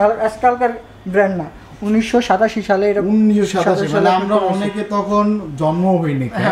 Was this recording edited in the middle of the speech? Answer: no; 0 cuts

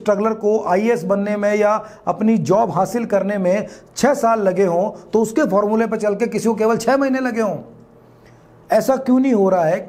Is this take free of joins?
yes; 0 cuts

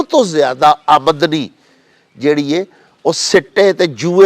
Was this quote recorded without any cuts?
yes; 0 cuts

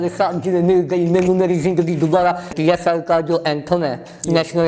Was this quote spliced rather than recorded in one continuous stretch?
yes; 1 cut; at 2.5 s

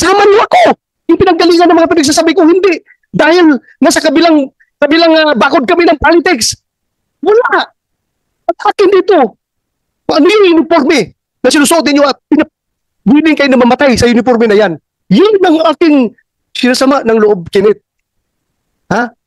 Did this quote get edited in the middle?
yes; 1 cut; at 0.9 s

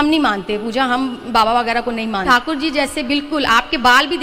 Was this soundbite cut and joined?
yes; 1 cut; at 2.2 s

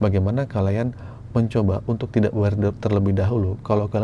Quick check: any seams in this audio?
no; 0 cuts

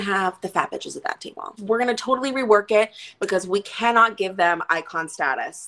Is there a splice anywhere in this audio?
yes; 1 cut; at 1.6 s

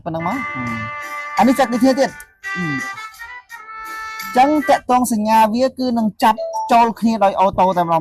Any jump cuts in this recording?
no; 0 cuts

